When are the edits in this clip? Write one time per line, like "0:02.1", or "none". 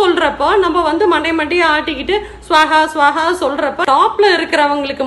0:03.8

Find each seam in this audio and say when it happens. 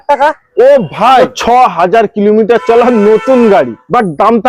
0:01.3

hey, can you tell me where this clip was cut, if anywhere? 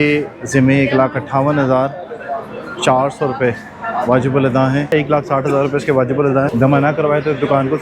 0:04.9
0:06.5

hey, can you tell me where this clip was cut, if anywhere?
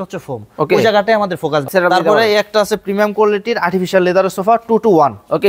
0:01.6

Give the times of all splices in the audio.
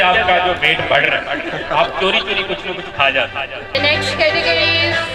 0:03.8

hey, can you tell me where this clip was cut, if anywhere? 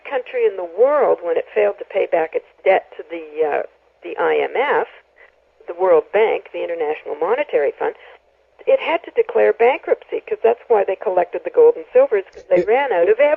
0:10.3

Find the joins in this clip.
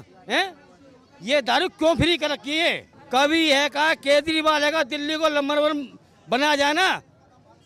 0:02.9

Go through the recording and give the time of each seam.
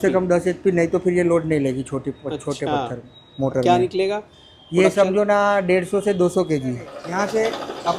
0:07.0

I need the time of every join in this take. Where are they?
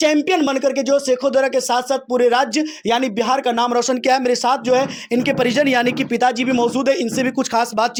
none

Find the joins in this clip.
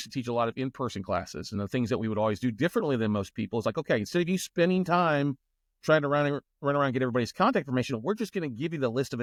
none

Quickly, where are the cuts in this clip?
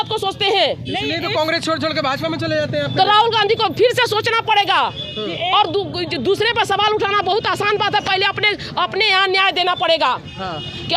none

